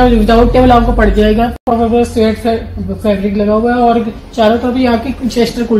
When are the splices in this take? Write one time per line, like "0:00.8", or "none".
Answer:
0:01.6